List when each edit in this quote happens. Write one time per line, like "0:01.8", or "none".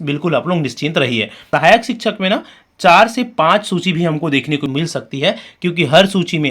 0:01.5
0:04.7

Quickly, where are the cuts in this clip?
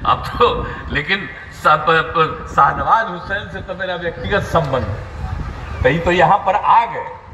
none

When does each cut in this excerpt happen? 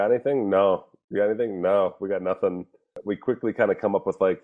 0:03.0

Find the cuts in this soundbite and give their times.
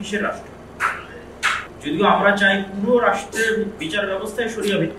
0:01.7

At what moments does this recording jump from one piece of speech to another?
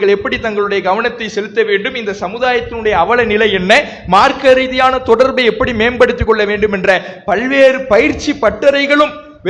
none

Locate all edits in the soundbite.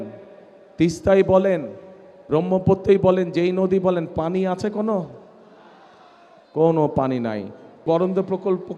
0:07.8

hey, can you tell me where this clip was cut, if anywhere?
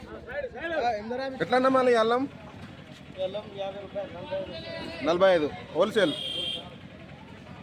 0:01.3

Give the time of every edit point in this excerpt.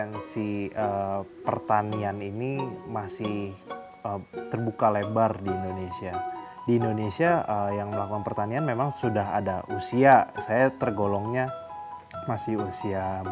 0:06.4

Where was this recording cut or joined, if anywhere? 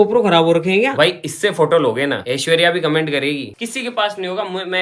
0:00.9
0:02.2
0:03.6

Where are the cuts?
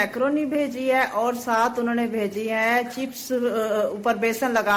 none

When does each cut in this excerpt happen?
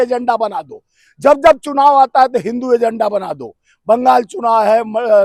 none

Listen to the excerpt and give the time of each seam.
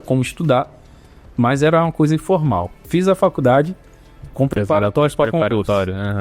0:02.8

